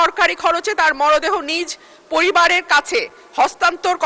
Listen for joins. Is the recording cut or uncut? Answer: uncut